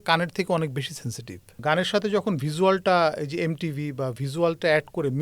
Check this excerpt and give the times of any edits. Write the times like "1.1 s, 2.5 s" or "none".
1.5 s